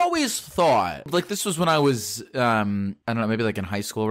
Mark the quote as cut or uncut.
cut